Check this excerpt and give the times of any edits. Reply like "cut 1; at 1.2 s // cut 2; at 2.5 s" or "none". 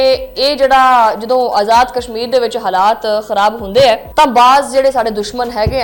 none